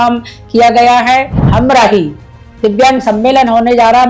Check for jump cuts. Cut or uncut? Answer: cut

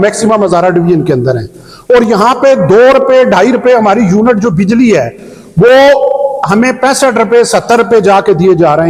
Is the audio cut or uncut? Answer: uncut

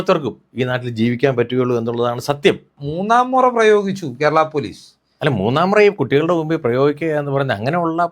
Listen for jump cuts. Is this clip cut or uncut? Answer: cut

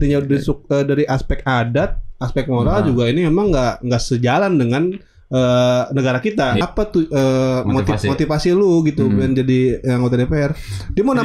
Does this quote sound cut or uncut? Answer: cut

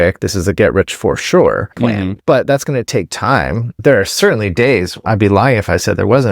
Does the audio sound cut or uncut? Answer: cut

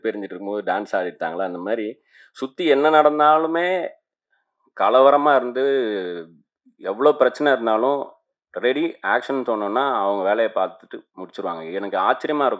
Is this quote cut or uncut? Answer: uncut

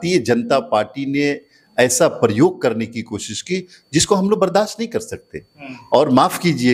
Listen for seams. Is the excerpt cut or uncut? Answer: uncut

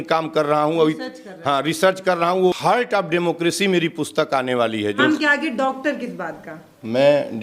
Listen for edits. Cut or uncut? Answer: cut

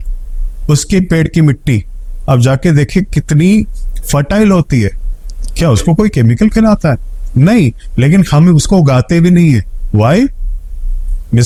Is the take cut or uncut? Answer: uncut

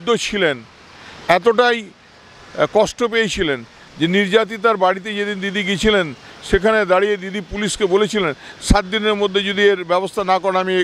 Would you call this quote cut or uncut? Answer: uncut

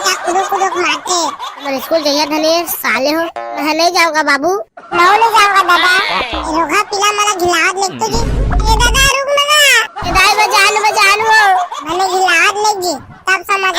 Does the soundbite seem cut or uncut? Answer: uncut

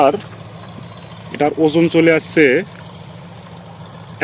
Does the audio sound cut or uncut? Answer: uncut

